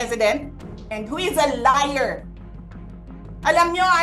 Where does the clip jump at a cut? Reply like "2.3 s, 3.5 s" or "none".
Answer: none